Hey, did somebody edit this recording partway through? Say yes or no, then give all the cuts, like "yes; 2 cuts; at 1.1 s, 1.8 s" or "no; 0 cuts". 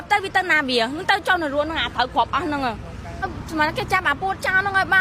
yes; 1 cut; at 3.1 s